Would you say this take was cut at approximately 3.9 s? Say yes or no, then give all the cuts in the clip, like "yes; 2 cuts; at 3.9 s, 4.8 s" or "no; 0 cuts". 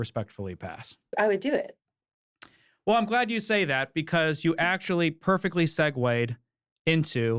no; 1 cut; at 1.1 s